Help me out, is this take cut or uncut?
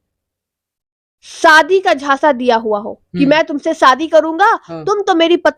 uncut